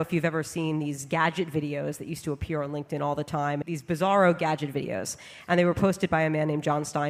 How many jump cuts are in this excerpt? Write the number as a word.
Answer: one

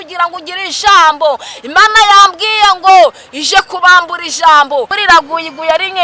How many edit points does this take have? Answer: one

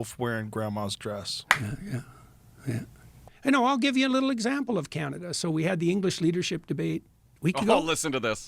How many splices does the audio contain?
one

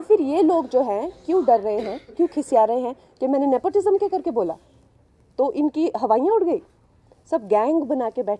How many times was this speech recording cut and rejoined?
zero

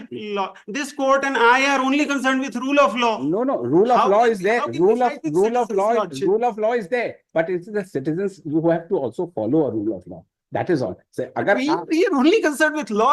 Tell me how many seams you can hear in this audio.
zero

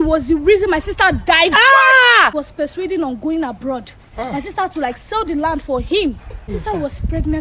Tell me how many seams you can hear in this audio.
two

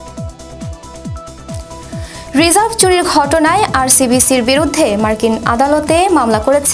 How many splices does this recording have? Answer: one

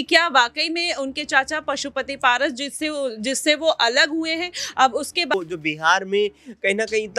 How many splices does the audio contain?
one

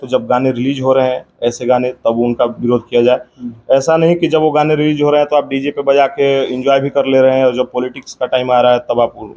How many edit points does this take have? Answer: zero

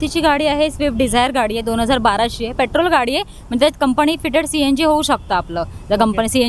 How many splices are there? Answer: zero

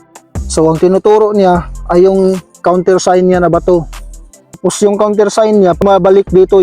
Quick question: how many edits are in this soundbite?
two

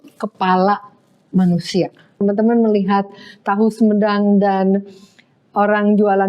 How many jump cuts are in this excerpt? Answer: one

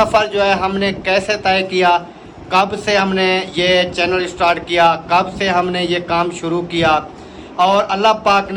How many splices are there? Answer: zero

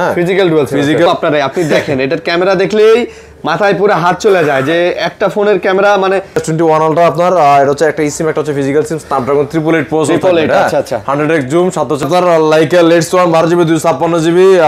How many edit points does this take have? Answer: three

